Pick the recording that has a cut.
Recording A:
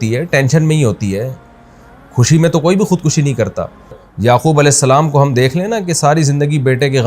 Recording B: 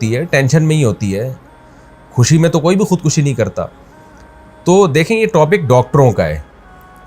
A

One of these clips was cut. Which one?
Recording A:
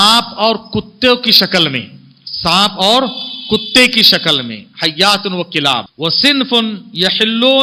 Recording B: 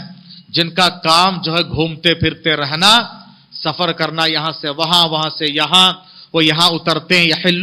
A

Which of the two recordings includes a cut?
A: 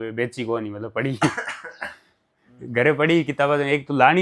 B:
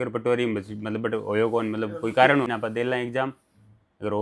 B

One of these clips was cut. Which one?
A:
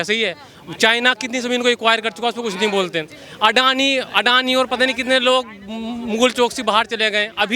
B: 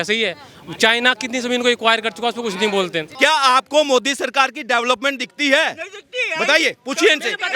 B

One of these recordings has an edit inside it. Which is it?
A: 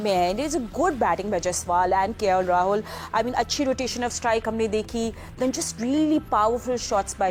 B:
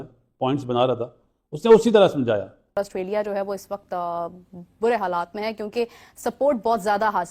B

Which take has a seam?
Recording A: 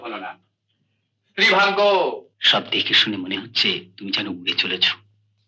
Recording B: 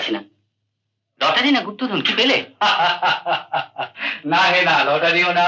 A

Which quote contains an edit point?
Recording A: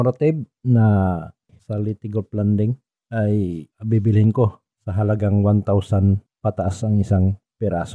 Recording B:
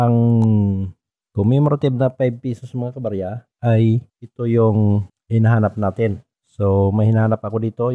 A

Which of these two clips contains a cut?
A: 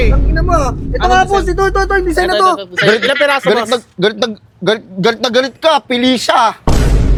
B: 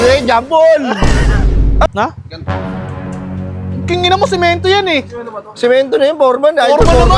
B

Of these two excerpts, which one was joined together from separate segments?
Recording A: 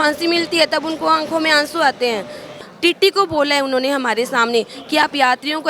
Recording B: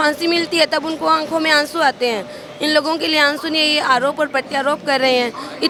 A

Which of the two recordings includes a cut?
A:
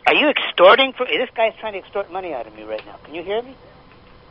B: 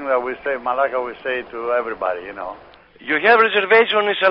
B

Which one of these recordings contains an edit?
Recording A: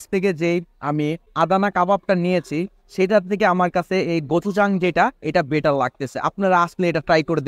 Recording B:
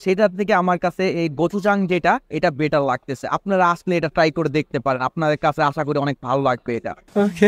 A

